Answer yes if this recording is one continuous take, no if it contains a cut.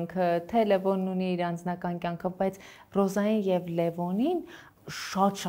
yes